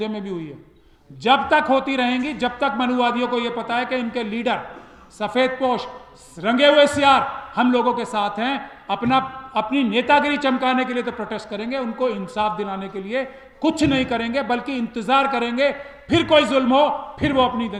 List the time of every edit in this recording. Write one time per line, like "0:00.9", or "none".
none